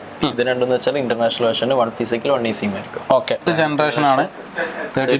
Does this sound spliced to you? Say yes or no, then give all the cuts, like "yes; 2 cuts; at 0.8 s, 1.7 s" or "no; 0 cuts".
yes; 1 cut; at 3.4 s